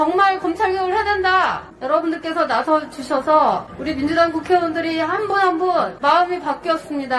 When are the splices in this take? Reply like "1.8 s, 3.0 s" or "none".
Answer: 1.7 s, 3.7 s, 5.9 s